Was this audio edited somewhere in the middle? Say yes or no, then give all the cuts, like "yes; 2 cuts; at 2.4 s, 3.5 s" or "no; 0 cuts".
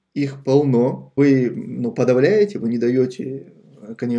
yes; 1 cut; at 1.1 s